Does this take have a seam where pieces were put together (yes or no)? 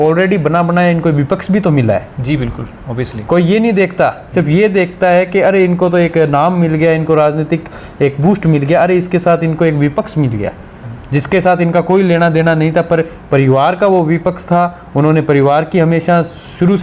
no